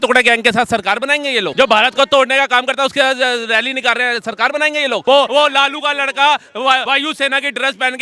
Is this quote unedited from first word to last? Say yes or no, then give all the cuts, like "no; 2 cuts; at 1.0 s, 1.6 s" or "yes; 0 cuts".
no; 3 cuts; at 1.5 s, 5.2 s, 6.8 s